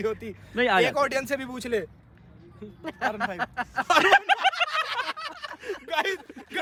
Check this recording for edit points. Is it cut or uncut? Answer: uncut